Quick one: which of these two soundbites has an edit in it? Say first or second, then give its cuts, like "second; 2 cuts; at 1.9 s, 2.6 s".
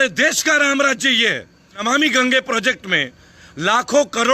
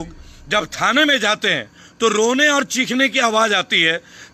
first; 1 cut; at 1.8 s